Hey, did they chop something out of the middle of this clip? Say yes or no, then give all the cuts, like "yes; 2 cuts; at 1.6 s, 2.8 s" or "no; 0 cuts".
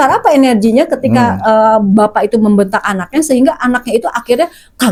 no; 0 cuts